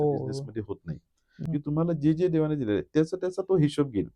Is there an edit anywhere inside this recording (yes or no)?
yes